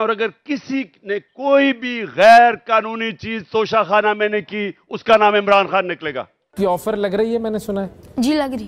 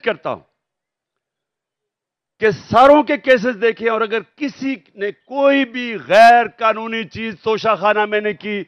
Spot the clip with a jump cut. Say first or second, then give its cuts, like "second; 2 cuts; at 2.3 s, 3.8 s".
first; 1 cut; at 6.5 s